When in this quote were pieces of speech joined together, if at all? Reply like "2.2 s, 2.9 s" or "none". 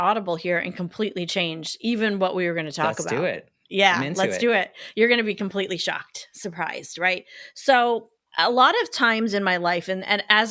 8.3 s